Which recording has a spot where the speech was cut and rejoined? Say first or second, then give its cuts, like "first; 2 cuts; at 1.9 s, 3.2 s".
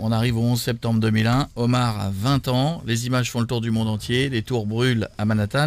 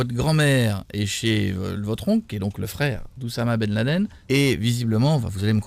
second; 1 cut; at 4.2 s